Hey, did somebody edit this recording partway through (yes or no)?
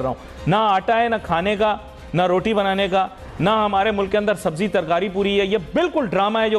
no